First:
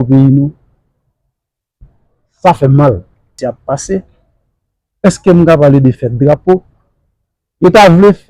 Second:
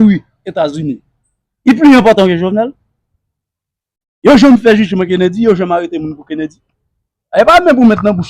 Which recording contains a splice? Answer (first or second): first